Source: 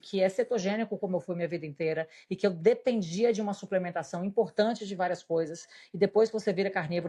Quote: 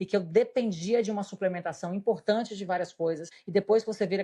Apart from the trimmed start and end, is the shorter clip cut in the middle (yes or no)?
yes